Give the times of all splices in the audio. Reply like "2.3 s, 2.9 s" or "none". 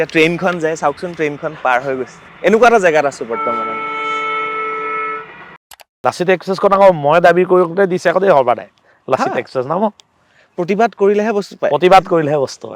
5.7 s